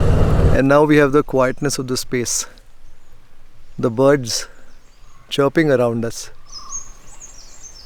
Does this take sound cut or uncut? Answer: cut